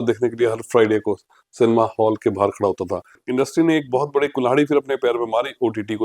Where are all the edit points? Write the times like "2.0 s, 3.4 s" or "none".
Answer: 3.2 s